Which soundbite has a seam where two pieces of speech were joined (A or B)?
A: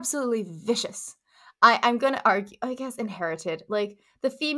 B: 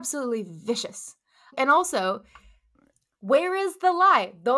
B